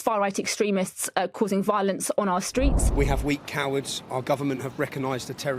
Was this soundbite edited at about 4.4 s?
no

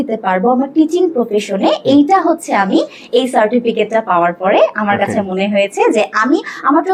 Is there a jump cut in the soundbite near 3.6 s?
no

